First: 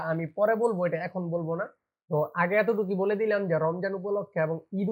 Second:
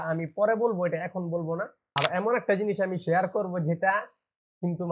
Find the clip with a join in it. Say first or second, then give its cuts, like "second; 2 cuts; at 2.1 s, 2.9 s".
second; 1 cut; at 1.8 s